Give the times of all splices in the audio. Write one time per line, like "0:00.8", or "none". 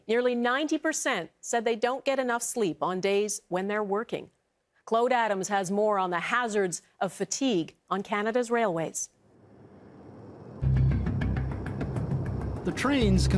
0:01.2